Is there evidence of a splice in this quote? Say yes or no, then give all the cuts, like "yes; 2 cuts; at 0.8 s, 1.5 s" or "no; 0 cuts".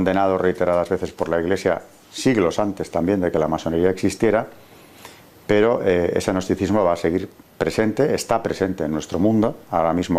yes; 1 cut; at 4.0 s